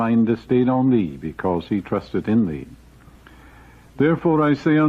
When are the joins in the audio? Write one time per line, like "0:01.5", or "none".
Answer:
0:02.7